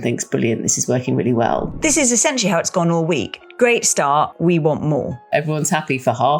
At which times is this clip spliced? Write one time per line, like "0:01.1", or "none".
0:01.7
0:03.4
0:04.3
0:05.3